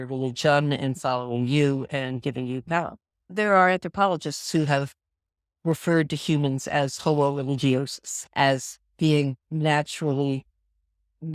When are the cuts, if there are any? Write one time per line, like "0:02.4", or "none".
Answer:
0:03.3
0:08.1